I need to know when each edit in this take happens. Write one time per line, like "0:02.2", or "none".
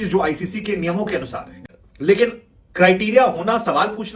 0:01.6